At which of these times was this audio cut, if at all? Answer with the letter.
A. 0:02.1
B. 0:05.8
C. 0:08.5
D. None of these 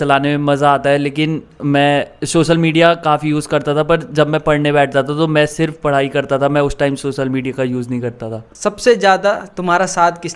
C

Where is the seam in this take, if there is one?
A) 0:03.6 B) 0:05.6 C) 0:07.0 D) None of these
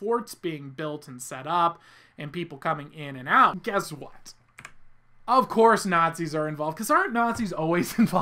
A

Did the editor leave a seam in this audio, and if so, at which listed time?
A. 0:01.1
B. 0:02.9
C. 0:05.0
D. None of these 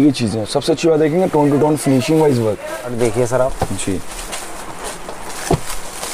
B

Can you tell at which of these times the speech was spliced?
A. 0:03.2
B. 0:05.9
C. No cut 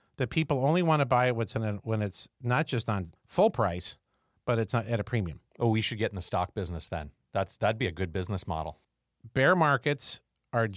A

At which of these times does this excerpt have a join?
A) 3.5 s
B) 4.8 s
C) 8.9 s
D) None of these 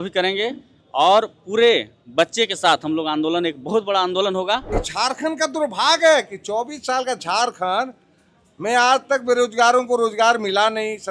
B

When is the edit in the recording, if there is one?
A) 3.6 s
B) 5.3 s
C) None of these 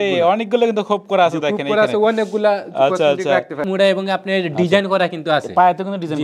A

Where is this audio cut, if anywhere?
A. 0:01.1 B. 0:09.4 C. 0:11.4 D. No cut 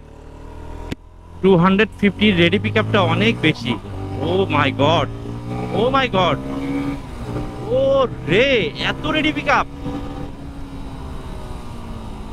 D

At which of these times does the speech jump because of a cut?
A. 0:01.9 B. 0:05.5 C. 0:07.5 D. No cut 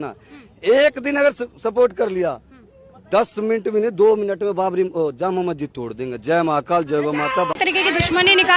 D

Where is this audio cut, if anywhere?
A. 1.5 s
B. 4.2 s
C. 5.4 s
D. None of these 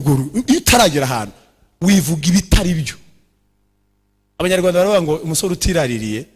D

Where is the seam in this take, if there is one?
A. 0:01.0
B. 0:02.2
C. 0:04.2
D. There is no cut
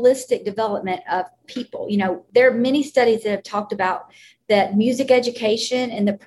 B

